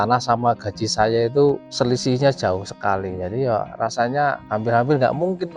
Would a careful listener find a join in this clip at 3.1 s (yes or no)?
no